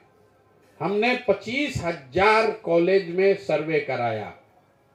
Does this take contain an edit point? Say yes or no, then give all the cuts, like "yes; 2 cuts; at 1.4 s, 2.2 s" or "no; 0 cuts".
no; 0 cuts